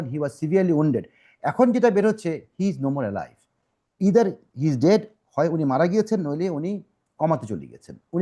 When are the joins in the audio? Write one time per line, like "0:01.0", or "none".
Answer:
none